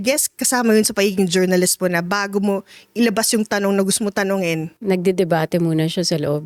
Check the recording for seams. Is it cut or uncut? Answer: uncut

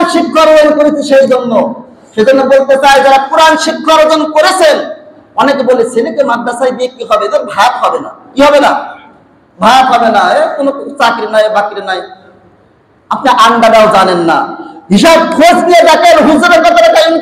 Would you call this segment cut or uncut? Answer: uncut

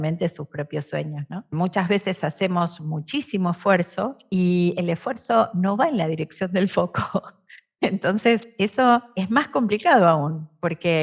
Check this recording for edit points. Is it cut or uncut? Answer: cut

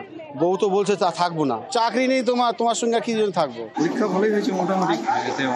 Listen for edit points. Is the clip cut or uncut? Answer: cut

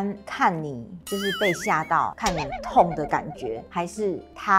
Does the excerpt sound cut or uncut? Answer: cut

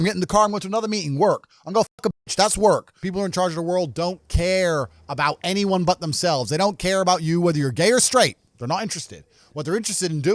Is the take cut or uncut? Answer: cut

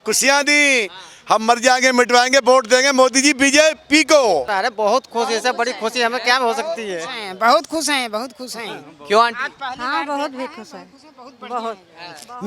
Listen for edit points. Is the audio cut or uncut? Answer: cut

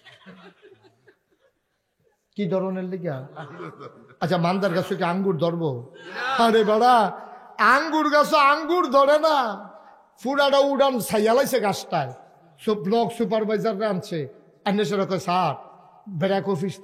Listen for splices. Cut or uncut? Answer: uncut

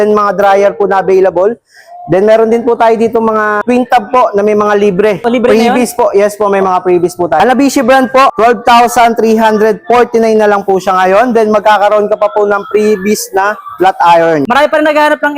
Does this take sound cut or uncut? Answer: cut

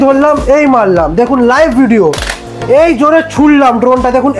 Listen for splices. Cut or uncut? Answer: uncut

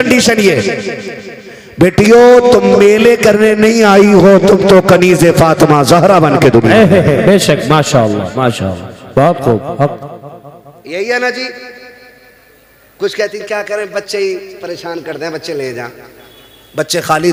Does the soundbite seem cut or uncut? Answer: uncut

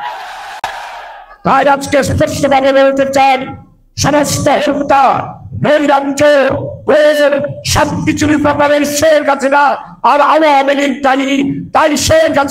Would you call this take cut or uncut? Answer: cut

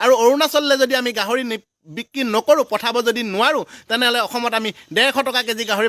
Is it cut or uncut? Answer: uncut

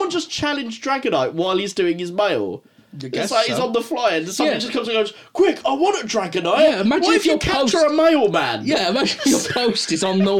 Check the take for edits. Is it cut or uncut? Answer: uncut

